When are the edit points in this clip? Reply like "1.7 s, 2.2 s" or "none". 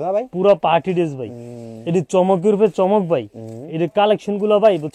none